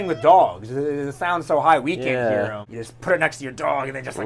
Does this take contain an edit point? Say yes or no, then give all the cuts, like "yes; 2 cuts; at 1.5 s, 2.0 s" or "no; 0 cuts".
yes; 1 cut; at 2.7 s